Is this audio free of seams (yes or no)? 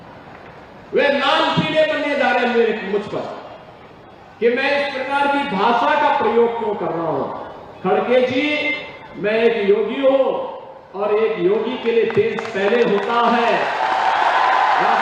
yes